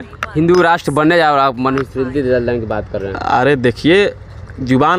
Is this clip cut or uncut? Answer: uncut